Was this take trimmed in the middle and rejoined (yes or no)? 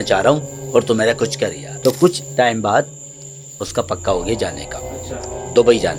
yes